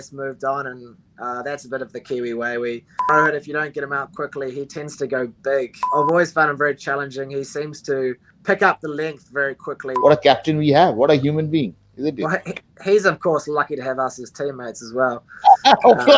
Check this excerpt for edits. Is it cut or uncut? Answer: cut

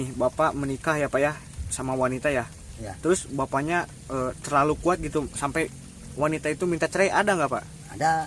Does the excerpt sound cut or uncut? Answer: uncut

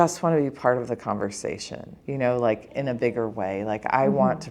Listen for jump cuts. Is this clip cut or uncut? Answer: uncut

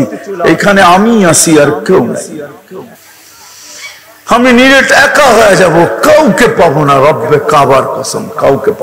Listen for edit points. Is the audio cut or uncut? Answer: cut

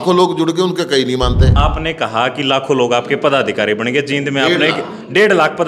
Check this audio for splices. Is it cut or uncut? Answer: cut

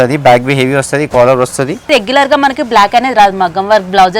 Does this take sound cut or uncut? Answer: cut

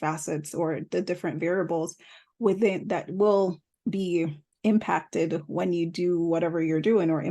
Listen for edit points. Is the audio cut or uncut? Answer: cut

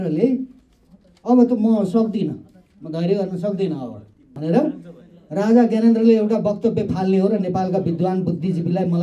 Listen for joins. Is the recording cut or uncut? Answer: cut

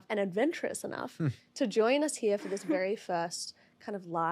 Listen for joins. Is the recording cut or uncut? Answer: uncut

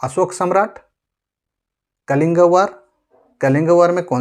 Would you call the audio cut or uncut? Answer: uncut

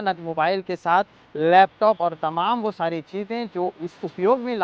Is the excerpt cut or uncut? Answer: uncut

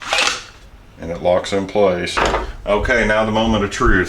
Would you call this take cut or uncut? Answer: cut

